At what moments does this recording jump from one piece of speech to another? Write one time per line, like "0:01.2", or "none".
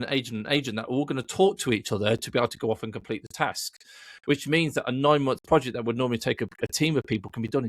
none